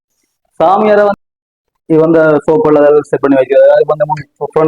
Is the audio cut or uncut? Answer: cut